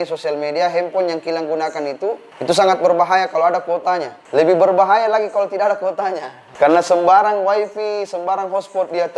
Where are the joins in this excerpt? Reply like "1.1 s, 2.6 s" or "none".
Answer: 2.3 s, 4.2 s, 6.4 s